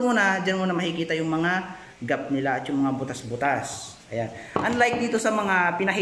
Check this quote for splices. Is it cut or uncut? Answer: uncut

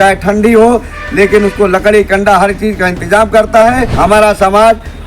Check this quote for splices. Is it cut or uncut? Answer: cut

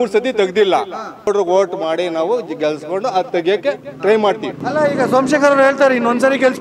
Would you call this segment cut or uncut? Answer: cut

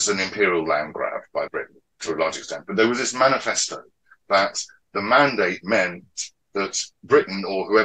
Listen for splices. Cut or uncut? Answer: cut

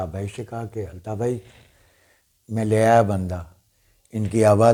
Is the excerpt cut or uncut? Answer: uncut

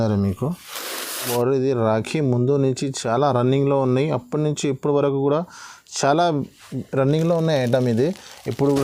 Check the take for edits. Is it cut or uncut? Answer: cut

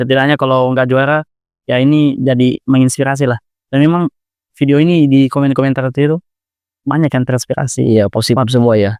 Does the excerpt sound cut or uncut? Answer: uncut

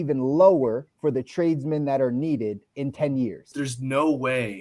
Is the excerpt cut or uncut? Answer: cut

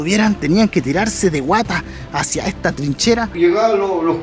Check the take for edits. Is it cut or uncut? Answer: cut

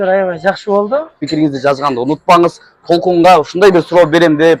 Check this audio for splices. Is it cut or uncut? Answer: cut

